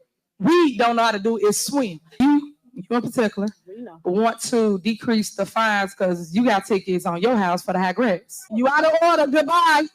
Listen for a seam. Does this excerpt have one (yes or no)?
yes